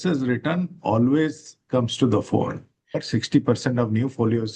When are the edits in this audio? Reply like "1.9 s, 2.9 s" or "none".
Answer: 3.0 s

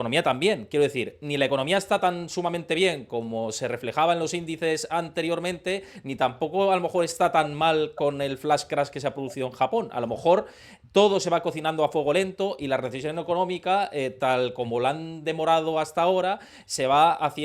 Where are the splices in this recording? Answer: none

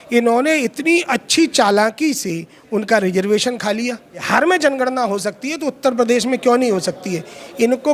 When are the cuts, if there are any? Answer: 4.3 s

